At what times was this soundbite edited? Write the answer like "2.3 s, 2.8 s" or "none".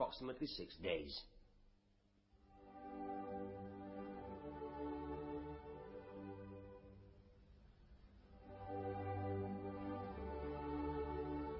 3.3 s